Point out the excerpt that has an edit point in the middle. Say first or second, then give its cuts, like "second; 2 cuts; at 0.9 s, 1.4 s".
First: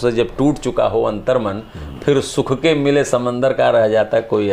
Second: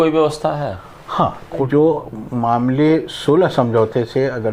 second; 1 cut; at 1.7 s